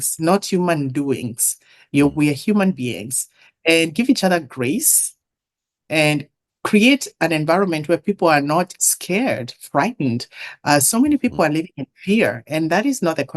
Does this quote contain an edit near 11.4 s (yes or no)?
no